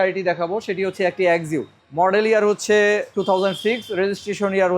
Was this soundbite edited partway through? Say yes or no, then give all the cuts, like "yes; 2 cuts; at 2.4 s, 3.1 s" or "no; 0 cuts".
yes; 2 cuts; at 1.8 s, 3.1 s